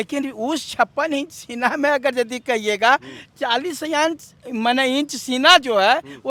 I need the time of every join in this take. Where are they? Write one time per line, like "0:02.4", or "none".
none